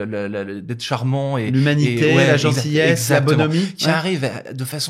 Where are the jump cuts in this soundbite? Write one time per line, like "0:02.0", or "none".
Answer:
none